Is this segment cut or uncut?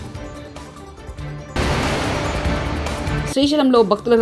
uncut